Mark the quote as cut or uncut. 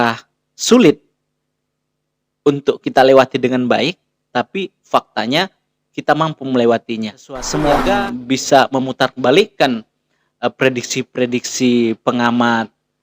cut